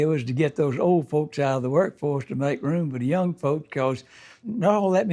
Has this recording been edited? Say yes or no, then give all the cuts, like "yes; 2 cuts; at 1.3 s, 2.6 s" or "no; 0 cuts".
yes; 1 cut; at 4.0 s